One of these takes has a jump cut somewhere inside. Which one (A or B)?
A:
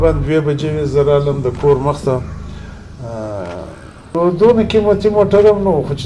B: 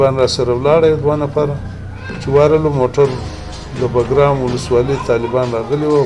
A